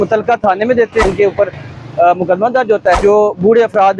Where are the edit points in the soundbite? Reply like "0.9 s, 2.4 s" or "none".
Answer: 1.0 s, 3.0 s